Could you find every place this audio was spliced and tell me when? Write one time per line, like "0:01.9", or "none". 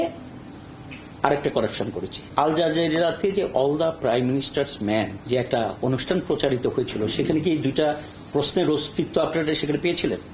0:02.2
0:05.2